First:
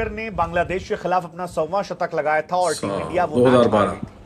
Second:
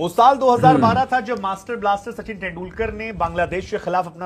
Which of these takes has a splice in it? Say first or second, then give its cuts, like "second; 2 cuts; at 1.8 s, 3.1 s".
first; 1 cut; at 3.3 s